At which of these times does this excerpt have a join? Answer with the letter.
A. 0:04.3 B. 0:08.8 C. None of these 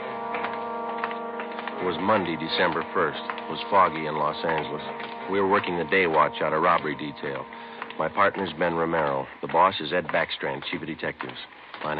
C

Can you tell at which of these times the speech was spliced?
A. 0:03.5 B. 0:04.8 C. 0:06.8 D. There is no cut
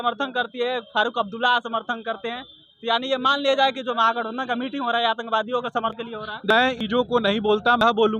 D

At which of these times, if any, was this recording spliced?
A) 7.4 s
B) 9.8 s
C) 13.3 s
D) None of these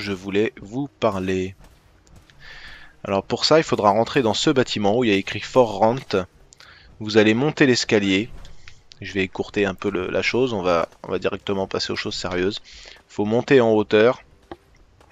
C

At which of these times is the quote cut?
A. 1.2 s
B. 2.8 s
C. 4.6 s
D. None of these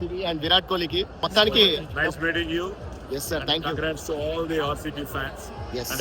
A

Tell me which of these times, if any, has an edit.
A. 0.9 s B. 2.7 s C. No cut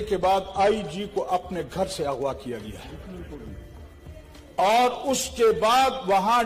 C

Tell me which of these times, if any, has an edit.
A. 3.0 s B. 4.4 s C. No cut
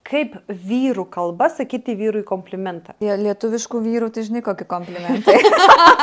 A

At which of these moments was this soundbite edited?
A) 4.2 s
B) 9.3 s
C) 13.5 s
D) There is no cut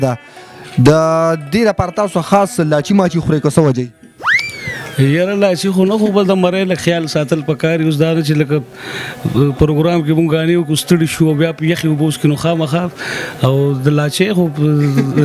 D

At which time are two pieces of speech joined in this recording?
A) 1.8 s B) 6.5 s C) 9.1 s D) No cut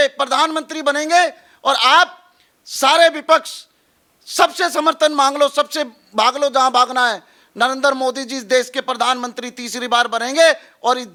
D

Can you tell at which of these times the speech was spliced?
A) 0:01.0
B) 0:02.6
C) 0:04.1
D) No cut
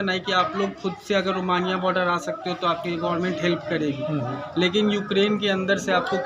D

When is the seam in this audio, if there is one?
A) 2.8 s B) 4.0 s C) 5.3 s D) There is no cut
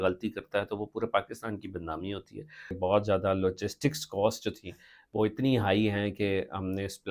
A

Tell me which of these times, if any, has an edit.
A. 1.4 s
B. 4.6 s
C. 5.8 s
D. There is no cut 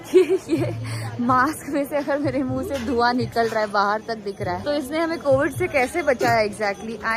B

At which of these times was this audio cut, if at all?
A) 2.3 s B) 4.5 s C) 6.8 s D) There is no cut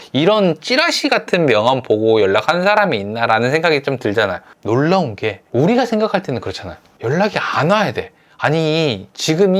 B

